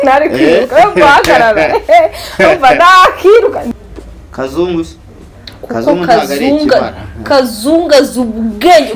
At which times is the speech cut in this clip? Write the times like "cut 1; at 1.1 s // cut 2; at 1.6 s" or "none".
cut 1; at 3.6 s